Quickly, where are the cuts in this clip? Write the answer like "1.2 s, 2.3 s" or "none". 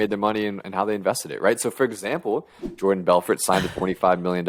none